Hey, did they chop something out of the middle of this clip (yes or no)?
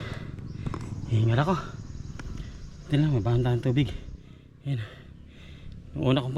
no